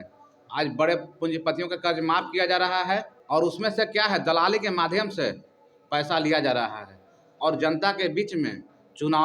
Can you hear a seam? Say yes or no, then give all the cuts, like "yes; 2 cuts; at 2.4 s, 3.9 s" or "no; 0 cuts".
no; 0 cuts